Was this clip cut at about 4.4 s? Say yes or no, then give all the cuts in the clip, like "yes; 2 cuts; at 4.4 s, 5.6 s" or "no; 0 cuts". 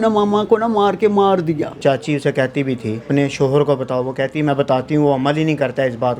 no; 2 cuts; at 1.8 s, 2.9 s